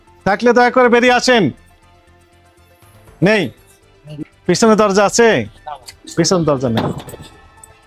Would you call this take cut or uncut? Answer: uncut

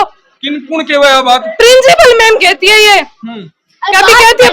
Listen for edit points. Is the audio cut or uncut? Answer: uncut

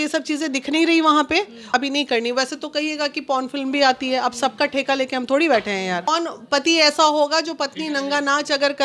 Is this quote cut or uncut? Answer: cut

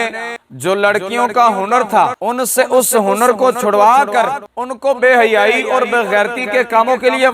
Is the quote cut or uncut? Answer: uncut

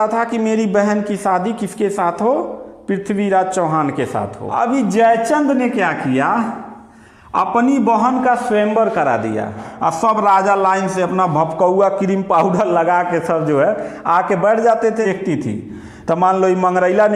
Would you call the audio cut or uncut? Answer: cut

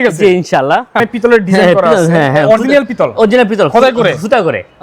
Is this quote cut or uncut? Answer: cut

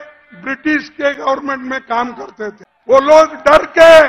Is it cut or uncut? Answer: cut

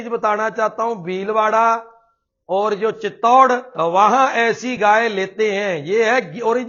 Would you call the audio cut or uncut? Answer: uncut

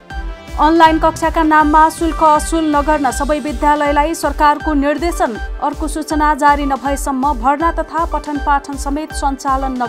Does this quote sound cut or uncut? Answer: uncut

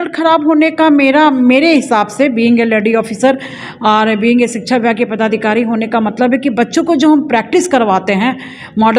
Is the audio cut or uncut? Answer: uncut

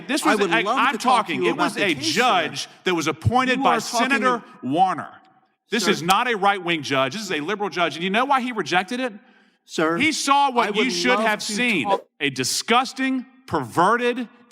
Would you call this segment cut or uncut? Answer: cut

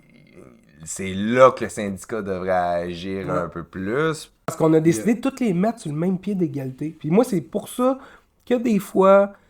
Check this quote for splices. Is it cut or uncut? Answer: cut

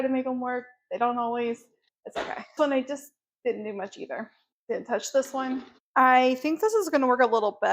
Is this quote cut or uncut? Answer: uncut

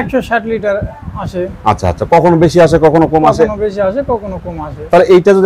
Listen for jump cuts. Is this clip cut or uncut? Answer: uncut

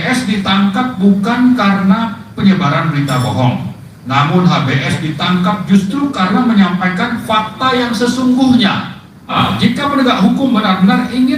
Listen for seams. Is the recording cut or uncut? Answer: cut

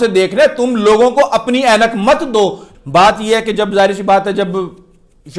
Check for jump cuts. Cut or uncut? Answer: cut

